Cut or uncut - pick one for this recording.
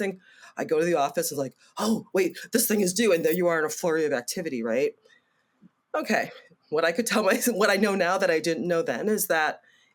uncut